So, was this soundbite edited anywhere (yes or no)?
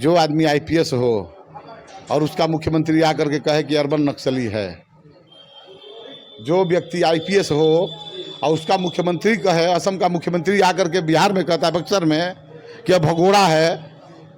no